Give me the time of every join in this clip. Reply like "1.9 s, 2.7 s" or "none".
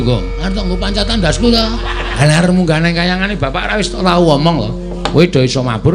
2.2 s